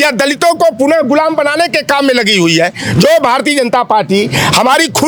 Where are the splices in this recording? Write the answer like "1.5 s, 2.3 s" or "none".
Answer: none